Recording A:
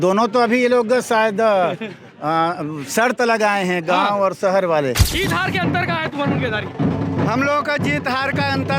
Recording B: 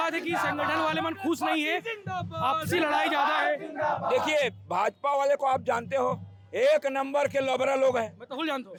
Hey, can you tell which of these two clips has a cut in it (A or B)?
A